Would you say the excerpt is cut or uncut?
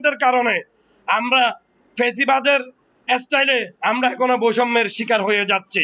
uncut